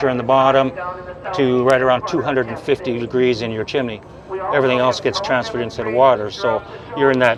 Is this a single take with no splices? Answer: yes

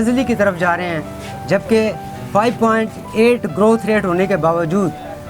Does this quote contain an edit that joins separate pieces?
no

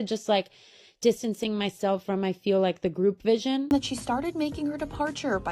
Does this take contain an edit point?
yes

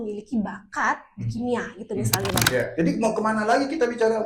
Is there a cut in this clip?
yes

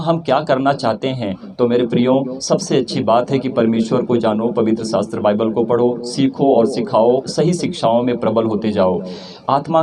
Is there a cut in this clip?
no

